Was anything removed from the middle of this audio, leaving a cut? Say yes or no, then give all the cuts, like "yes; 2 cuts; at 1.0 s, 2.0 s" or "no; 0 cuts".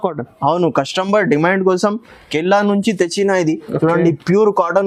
no; 0 cuts